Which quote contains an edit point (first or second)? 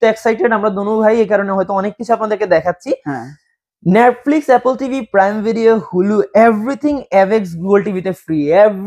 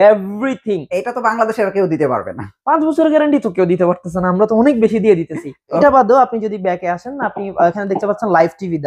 second